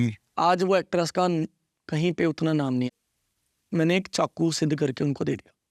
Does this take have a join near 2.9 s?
yes; 1 cut; at 2.9 s

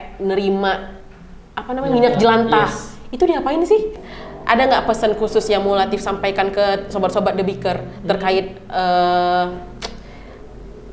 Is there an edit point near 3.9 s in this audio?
yes; 1 cut; at 3.9 s

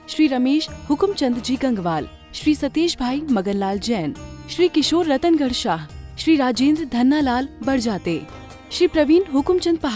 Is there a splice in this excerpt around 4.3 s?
no; 0 cuts

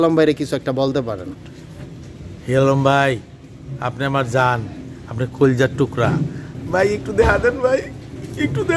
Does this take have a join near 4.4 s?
no; 1 cut; at 6.5 s

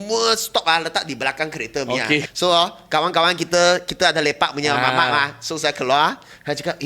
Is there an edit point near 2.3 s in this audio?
yes; 1 cut; at 2.3 s

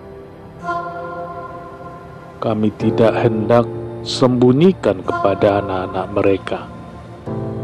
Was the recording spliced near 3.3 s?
no; 1 cut; at 1.7 s

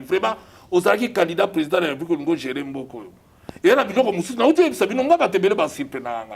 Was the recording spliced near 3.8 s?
no; 0 cuts

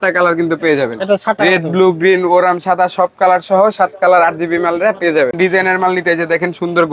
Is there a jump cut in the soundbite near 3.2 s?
no; 1 cut; at 5.4 s

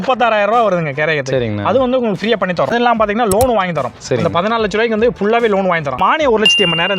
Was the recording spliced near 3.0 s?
yes; 2 cuts; at 3.0 s, 6.0 s

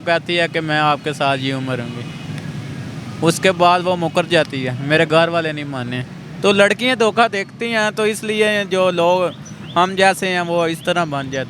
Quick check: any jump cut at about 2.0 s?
no; 0 cuts

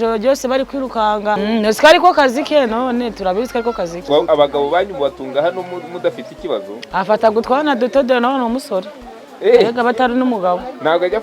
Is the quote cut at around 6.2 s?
no; 2 cuts; at 1.4 s, 4.0 s

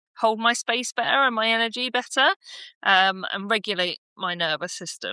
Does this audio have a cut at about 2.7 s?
no; 0 cuts

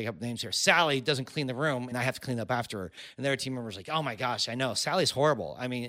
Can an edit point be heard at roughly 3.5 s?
no; 1 cut; at 1.9 s

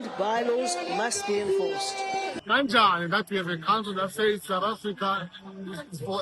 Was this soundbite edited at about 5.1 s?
no; 1 cut; at 2.4 s

